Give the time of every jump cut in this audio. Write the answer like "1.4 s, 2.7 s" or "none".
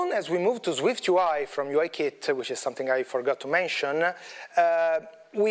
none